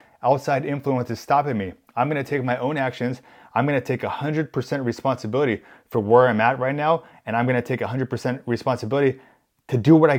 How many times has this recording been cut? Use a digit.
0